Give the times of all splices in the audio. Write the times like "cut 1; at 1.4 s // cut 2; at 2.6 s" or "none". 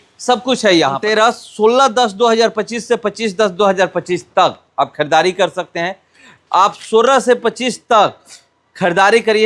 cut 1; at 1.0 s